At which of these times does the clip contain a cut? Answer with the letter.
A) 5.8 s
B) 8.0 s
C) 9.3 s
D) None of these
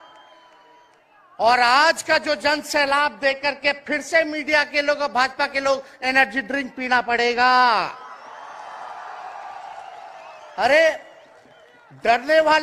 D